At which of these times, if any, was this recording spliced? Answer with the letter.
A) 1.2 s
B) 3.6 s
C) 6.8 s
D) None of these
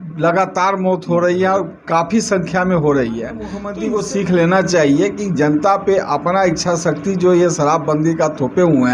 B